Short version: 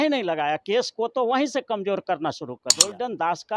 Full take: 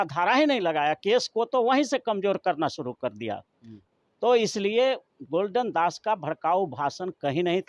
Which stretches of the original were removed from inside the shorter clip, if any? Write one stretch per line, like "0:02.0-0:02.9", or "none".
0:03.0-0:05.2